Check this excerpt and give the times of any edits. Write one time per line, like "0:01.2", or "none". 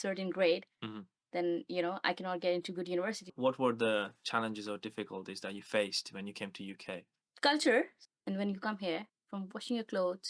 0:03.3
0:07.2
0:08.1
0:09.2